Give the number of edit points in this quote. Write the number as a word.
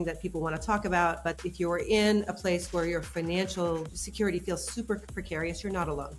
one